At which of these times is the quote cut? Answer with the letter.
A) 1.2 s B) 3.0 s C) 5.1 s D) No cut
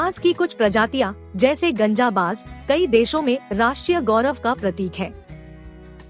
C